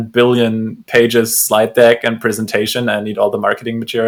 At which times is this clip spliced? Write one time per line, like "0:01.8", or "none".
none